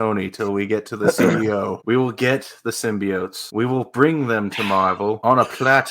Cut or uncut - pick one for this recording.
cut